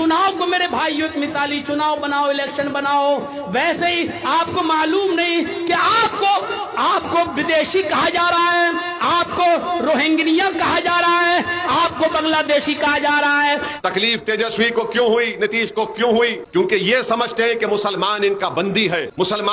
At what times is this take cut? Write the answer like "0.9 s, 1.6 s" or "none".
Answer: 13.8 s

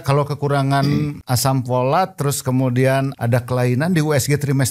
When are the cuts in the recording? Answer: 1.2 s, 3.1 s

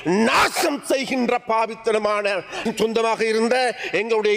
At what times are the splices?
2.6 s

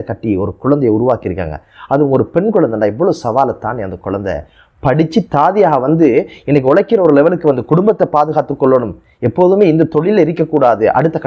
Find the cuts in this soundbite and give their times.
none

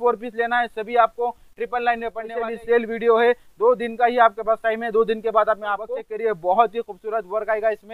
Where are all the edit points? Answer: 2.2 s, 6.0 s

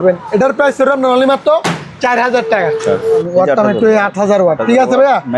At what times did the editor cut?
3.2 s

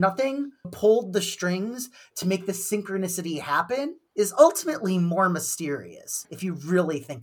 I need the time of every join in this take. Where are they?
6.2 s

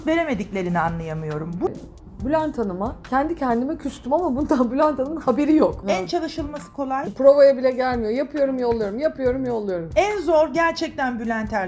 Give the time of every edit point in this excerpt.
1.7 s, 5.8 s, 7.1 s

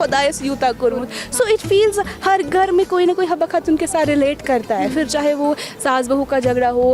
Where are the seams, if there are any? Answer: none

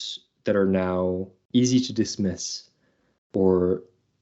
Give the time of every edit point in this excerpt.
1.3 s

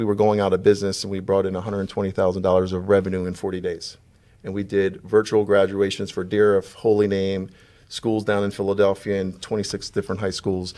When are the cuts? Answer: none

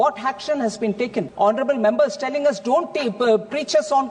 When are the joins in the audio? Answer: 1.3 s

